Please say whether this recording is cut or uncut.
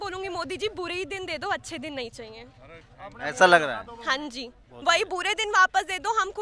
uncut